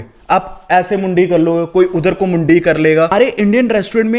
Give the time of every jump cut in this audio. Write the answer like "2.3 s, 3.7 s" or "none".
3.1 s